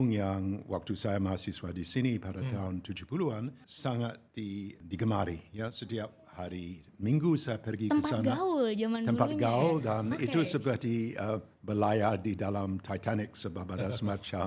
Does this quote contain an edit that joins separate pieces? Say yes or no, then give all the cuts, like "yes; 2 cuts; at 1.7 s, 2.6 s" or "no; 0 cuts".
yes; 2 cuts; at 3.5 s, 4.8 s